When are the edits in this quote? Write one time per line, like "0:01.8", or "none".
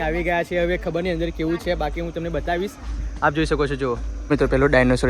0:04.1